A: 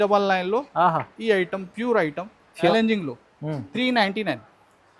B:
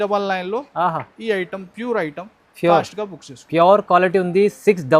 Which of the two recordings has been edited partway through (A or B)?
A